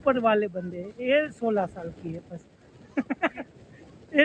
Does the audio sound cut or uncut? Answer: uncut